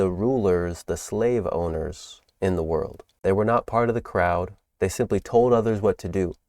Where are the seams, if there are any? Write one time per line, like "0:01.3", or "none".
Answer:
0:03.0
0:04.6